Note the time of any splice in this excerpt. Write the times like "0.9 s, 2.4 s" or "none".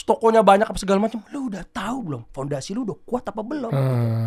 none